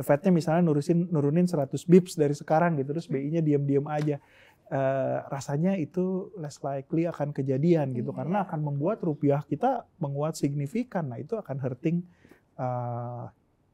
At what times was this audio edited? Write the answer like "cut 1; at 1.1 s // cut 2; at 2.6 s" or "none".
none